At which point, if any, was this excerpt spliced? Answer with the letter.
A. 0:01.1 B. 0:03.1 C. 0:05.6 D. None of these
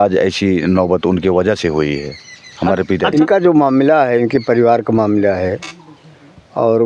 B